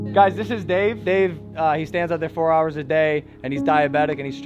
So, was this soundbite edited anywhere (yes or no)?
yes